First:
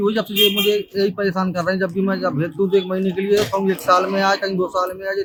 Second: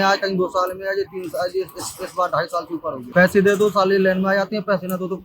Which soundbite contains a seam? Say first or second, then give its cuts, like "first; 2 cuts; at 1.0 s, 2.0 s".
second; 1 cut; at 3.0 s